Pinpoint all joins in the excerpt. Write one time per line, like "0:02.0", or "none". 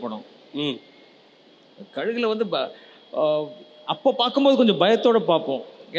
none